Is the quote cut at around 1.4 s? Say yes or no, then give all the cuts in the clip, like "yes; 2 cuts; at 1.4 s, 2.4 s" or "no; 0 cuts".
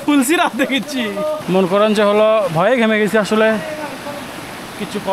yes; 1 cut; at 1.4 s